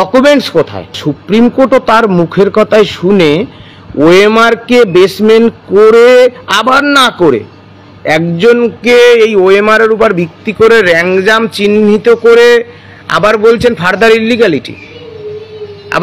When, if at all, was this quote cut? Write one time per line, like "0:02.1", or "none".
0:01.1